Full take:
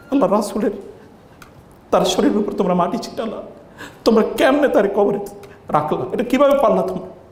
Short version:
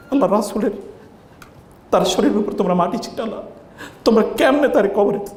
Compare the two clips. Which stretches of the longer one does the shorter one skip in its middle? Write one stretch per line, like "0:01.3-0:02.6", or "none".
none